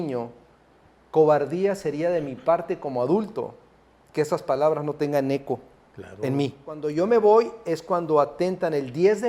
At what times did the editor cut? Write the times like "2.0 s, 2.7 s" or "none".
6.9 s

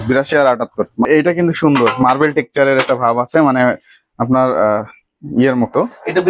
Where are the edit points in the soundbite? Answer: 1.1 s

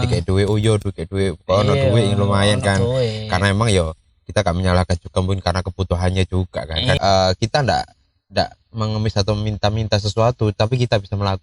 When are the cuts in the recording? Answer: 7.0 s

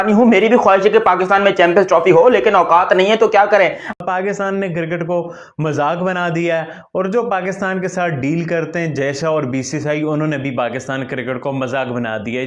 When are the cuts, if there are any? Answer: 3.9 s

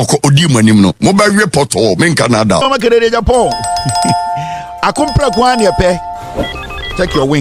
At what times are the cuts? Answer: 2.7 s

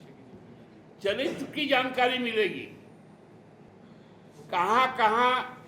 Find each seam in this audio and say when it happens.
3.7 s

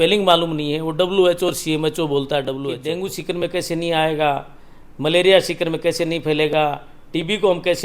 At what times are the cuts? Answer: 2.8 s

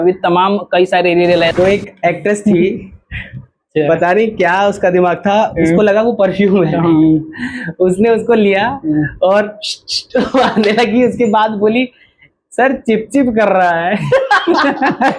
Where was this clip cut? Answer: 1.5 s

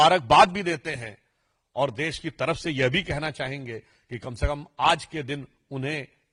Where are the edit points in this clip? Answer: none

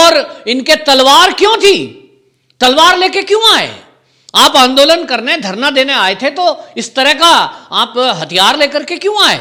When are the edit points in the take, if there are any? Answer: none

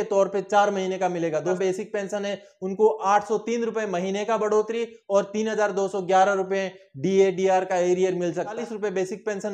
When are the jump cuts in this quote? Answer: 1.6 s, 8.6 s

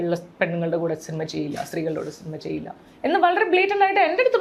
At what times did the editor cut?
none

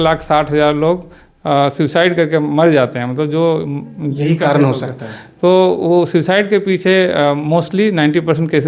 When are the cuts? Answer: none

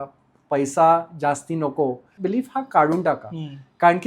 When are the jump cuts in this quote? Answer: 2.1 s

